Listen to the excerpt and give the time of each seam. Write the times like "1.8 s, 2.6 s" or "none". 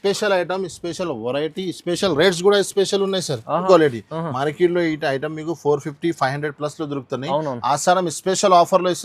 3.6 s